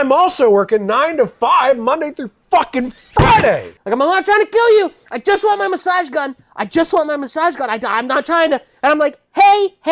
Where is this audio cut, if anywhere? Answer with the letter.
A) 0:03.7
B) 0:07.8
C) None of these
A